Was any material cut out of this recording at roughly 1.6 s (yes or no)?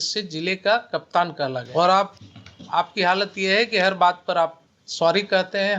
yes